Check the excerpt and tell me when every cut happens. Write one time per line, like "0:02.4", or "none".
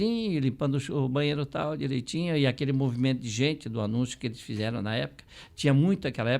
none